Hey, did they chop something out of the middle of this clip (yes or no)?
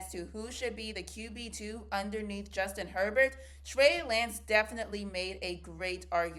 no